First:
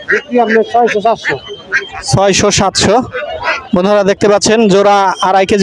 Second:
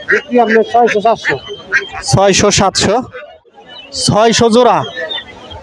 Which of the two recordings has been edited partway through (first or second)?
second